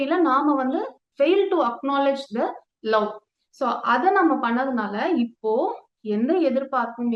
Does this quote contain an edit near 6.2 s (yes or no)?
no